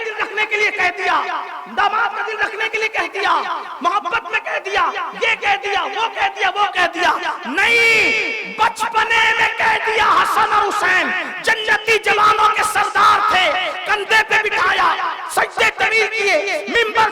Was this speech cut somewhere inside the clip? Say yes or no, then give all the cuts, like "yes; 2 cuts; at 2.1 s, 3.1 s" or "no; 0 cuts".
no; 0 cuts